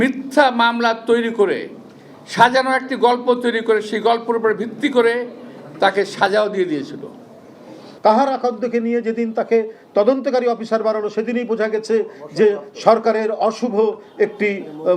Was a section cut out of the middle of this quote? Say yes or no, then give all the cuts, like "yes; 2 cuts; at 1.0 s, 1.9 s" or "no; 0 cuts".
yes; 1 cut; at 7.5 s